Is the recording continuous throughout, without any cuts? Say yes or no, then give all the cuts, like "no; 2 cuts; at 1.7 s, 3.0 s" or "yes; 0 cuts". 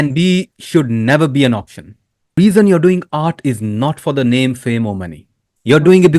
no; 1 cut; at 2.3 s